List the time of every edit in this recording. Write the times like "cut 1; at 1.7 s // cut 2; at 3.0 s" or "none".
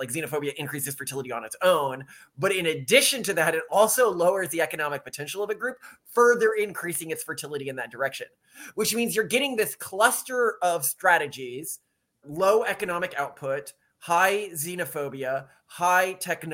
cut 1; at 12.2 s